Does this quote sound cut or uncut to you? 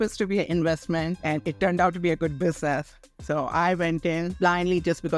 cut